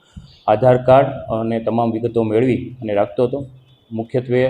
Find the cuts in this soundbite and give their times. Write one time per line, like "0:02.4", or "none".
none